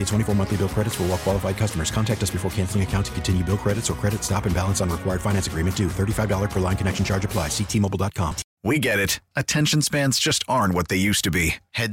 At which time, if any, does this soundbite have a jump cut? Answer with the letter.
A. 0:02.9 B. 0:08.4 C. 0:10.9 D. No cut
B